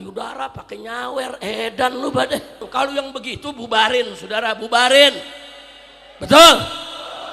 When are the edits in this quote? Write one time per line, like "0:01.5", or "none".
0:02.7